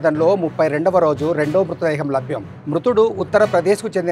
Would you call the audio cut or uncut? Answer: uncut